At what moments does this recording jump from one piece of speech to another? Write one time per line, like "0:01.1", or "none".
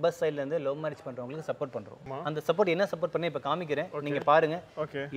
0:02.1